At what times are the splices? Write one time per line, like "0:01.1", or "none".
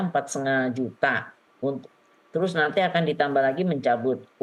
none